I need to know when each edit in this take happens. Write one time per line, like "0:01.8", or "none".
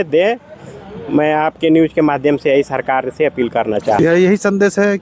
0:04.0